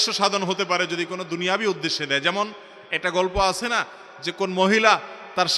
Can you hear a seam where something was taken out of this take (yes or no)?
no